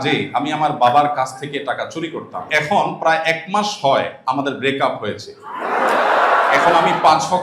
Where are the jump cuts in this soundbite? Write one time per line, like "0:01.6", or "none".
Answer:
0:02.5

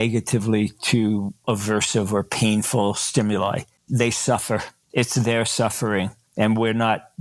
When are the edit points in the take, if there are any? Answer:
0:01.4
0:03.7
0:04.8
0:06.2

